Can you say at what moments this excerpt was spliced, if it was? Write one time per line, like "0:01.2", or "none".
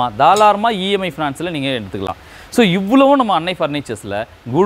none